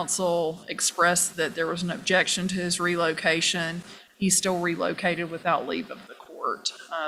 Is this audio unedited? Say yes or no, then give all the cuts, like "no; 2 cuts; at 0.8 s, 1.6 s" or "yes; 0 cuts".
yes; 0 cuts